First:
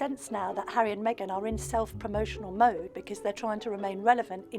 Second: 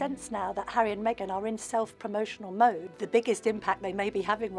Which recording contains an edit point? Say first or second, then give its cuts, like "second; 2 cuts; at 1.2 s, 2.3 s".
second; 1 cut; at 2.9 s